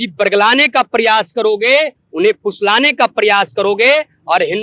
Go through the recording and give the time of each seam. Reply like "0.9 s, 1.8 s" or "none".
none